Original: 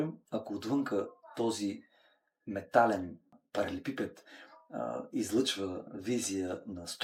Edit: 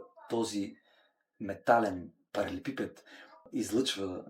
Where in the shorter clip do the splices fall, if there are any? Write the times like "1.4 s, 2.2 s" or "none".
2.2 s, 3.5 s